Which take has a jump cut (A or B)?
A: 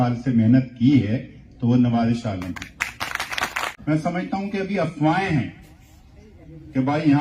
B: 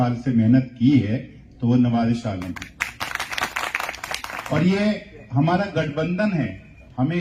A